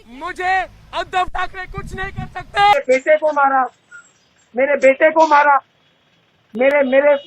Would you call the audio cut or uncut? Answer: cut